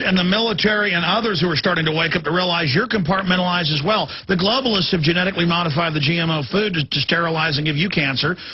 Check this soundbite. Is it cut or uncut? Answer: cut